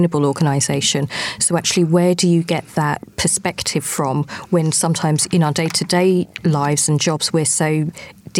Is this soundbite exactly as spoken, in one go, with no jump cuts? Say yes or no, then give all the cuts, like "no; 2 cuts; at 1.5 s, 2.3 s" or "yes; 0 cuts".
yes; 0 cuts